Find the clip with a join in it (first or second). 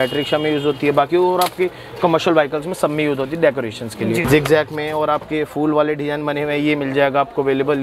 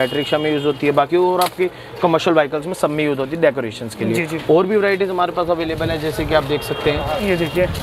first